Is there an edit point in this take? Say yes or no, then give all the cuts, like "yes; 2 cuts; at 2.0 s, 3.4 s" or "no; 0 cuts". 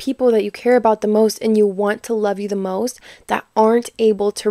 no; 0 cuts